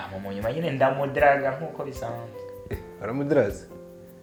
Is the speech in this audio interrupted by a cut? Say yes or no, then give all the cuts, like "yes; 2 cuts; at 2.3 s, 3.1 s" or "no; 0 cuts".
no; 0 cuts